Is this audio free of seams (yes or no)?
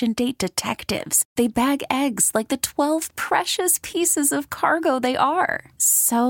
yes